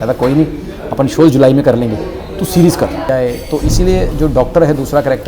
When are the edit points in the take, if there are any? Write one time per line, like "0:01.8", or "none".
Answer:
0:03.1